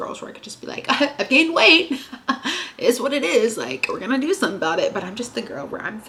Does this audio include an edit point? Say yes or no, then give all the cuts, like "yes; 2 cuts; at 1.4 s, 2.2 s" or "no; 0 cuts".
no; 0 cuts